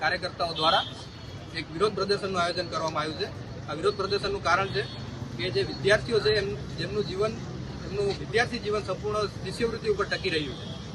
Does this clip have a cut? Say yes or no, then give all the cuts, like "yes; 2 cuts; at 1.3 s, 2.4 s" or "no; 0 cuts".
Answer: no; 0 cuts